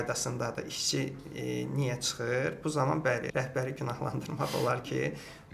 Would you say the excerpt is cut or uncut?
cut